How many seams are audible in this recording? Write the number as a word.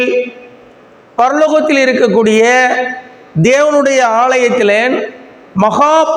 zero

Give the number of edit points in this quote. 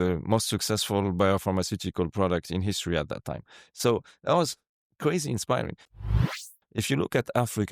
one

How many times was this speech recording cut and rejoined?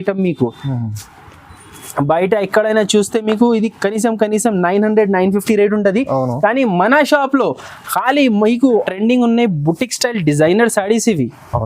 one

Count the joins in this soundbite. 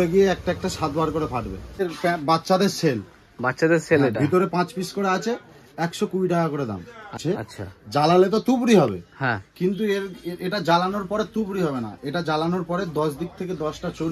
two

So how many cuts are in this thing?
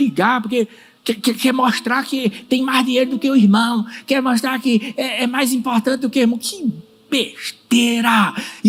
zero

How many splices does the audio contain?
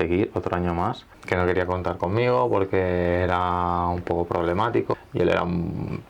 two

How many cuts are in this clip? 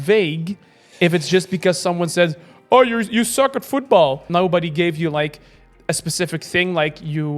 one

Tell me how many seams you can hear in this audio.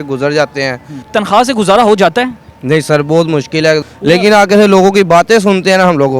two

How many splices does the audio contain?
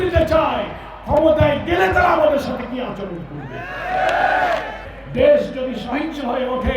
one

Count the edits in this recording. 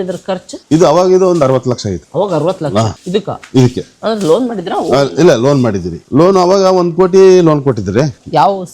zero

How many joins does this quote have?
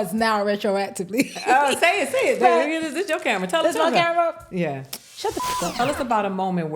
one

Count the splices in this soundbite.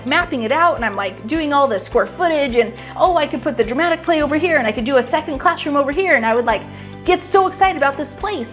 zero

